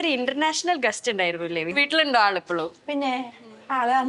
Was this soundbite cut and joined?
yes; 1 cut; at 1.7 s

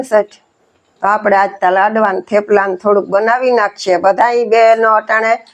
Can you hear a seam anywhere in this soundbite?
no; 0 cuts

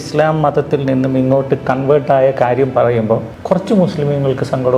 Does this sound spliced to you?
yes; 1 cut; at 3.3 s

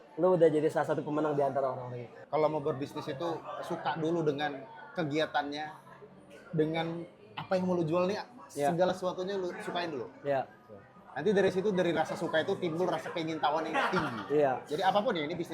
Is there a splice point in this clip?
yes; 1 cut; at 2.1 s

